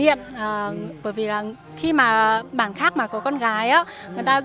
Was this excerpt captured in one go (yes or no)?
yes